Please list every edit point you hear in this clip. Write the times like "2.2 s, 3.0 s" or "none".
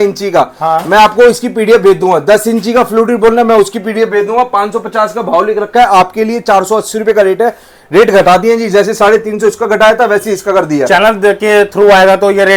none